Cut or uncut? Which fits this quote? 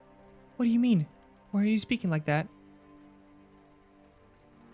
uncut